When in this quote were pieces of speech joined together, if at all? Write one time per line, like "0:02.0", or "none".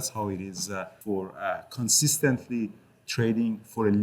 0:00.9